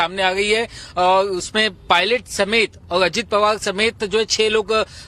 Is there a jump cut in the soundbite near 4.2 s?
no; 1 cut; at 1.5 s

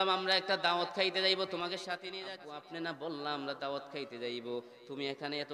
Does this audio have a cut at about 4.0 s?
no; 1 cut; at 2.0 s

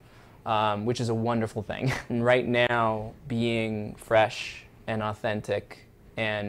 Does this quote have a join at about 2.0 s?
yes; 1 cut; at 2.0 s

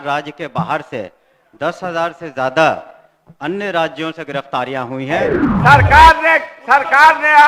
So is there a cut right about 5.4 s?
yes; 1 cut; at 5.4 s

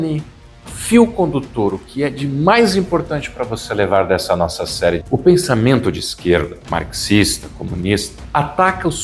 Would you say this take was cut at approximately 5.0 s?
yes; 3 cuts; at 5.0 s, 6.6 s, 8.2 s

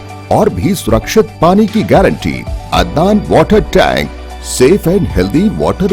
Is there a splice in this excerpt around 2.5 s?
yes; 1 cut; at 2.5 s

